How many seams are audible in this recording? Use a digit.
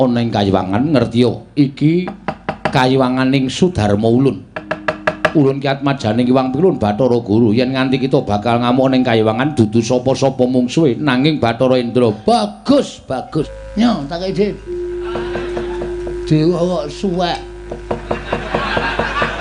1